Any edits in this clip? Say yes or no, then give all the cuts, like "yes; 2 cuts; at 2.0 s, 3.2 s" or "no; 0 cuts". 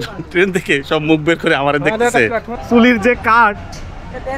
yes; 1 cut; at 2.5 s